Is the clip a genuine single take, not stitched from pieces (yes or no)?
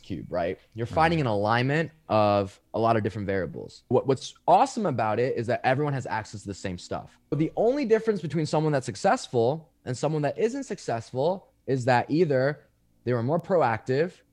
no